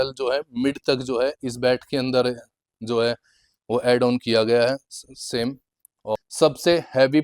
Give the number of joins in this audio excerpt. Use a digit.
1